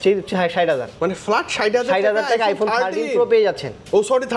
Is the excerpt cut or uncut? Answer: uncut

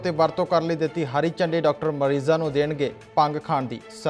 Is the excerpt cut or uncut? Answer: uncut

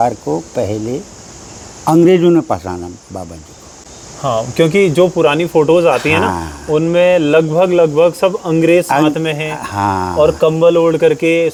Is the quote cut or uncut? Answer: uncut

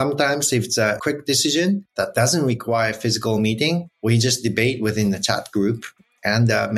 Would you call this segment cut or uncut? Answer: cut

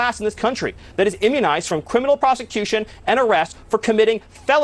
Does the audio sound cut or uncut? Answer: uncut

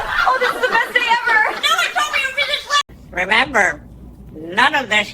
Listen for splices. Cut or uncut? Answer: cut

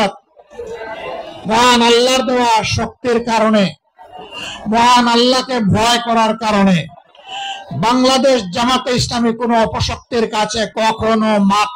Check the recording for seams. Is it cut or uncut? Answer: uncut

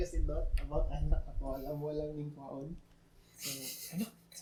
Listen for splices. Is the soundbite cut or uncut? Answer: uncut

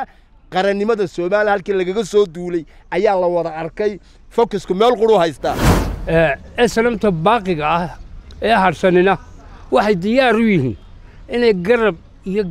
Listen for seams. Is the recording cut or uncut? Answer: cut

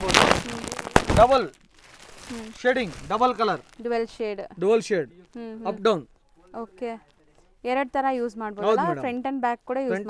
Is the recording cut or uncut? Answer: uncut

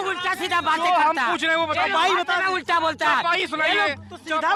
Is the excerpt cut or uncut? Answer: uncut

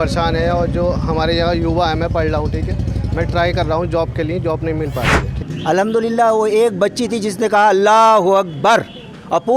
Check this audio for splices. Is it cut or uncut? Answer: cut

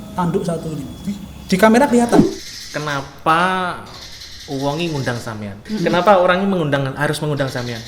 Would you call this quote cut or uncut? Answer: cut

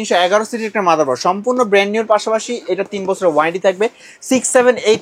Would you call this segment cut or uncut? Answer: uncut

